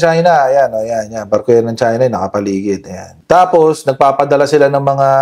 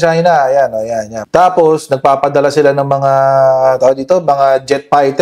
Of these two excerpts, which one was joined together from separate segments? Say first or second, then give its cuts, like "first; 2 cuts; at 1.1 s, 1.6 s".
second; 1 cut; at 1.1 s